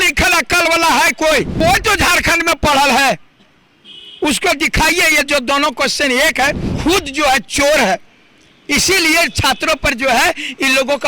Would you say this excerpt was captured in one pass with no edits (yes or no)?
no